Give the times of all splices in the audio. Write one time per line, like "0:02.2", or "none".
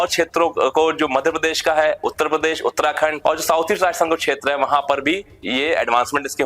0:03.2